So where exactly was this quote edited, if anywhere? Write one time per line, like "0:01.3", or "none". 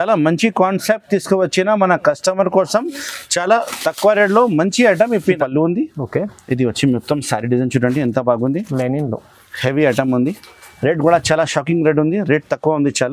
0:05.4